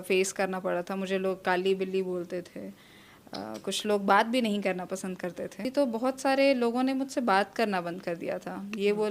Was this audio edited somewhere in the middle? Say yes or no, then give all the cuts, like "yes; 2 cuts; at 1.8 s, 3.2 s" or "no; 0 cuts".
yes; 1 cut; at 5.7 s